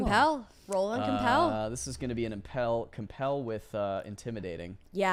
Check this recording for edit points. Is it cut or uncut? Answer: uncut